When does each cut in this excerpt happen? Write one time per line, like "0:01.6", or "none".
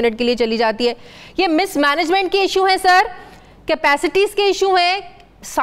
none